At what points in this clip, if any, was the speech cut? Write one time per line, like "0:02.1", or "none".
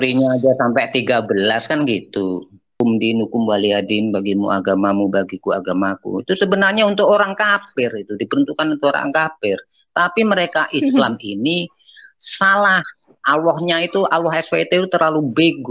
0:02.7